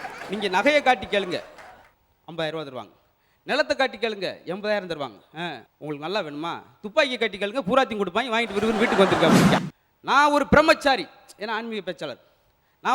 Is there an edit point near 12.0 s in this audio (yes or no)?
no